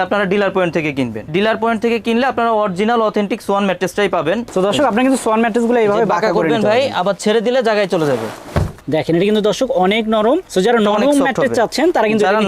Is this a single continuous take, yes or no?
no